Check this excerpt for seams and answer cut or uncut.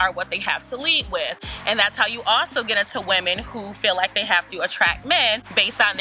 uncut